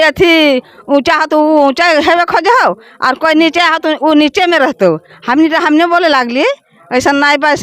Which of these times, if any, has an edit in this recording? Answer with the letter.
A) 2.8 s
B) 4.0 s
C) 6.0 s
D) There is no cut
D